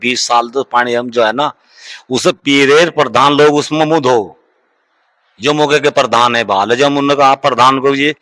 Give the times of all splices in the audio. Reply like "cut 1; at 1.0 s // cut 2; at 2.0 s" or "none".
none